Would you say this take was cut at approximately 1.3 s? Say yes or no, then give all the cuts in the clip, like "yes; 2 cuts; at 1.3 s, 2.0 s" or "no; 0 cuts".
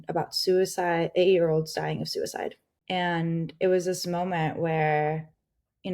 no; 1 cut; at 2.7 s